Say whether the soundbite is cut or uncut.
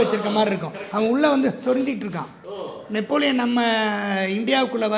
uncut